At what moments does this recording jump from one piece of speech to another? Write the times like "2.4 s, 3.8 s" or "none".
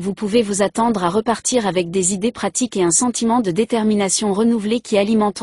none